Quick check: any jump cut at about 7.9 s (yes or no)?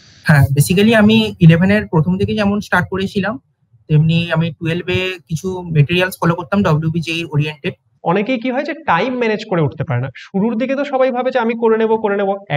yes